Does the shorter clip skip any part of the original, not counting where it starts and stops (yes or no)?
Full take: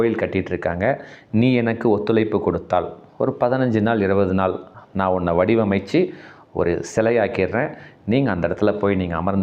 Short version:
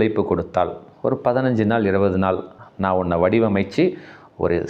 no